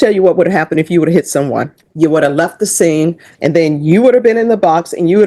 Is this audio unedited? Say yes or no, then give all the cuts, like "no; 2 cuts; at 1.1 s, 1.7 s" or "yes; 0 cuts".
no; 2 cuts; at 1.8 s, 3.3 s